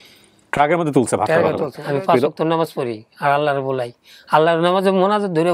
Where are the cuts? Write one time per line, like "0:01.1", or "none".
0:01.7